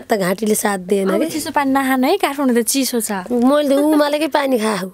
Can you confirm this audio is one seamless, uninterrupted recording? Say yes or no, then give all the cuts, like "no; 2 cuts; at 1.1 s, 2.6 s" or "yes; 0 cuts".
yes; 0 cuts